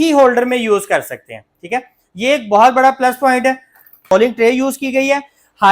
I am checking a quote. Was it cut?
yes; 1 cut; at 4.1 s

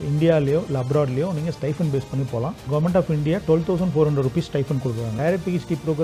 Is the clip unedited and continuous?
no; 2 cuts; at 2.6 s, 5.1 s

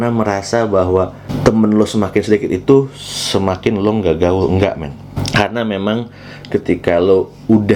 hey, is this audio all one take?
yes; 0 cuts

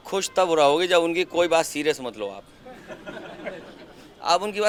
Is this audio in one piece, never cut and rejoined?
yes; 0 cuts

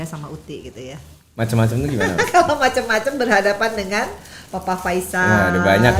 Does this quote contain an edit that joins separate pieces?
no; 0 cuts

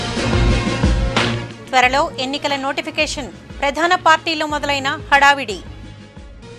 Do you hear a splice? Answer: no; 0 cuts

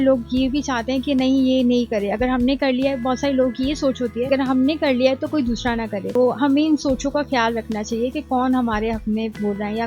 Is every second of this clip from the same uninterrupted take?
yes; 0 cuts

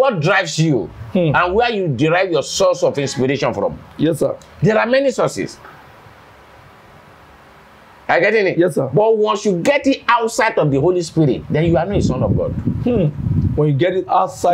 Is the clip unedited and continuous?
yes; 0 cuts

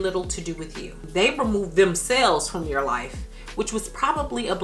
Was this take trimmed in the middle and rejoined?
yes; 1 cut; at 1.0 s

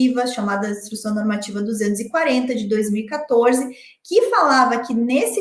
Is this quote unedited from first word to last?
yes; 0 cuts

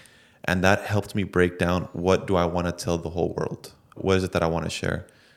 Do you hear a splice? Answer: yes; 1 cut; at 4.0 s

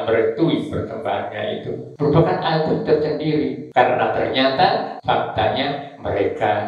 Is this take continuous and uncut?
no; 3 cuts; at 1.9 s, 3.6 s, 4.9 s

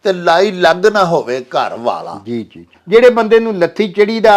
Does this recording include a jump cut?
yes; 1 cut; at 2.7 s

